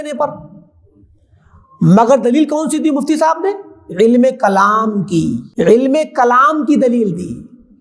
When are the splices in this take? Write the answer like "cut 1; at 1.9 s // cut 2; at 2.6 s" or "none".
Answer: cut 1; at 5.4 s